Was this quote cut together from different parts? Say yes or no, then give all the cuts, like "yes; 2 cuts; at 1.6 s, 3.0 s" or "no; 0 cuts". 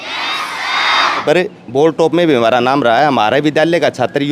yes; 1 cut; at 1.2 s